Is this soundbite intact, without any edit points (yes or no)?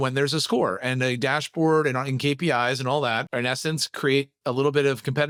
yes